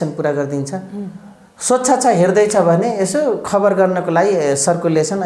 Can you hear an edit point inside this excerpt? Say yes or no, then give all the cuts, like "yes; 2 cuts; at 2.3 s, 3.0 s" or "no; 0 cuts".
no; 0 cuts